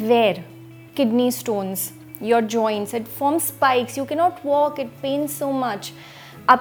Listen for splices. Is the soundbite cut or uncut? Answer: uncut